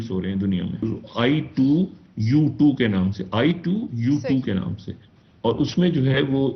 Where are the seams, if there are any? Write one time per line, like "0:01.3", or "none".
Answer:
0:00.9

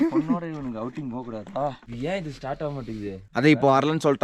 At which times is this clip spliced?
0:01.8
0:03.2

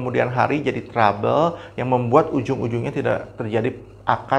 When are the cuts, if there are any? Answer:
none

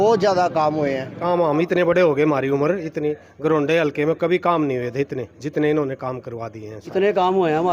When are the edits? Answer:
0:01.2
0:07.0

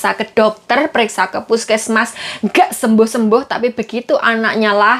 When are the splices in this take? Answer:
none

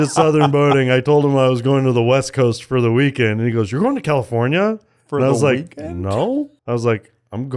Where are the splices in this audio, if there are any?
0:06.6

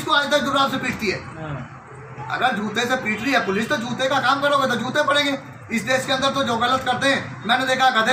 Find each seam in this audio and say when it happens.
none

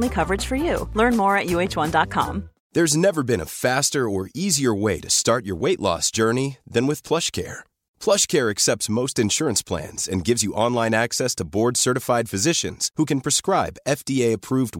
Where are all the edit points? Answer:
0:02.6

